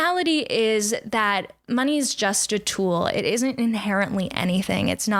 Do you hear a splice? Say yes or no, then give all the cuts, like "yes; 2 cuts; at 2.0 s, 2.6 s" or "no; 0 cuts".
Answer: no; 0 cuts